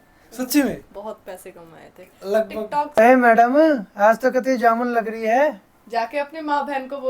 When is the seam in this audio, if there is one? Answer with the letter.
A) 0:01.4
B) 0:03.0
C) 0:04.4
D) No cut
B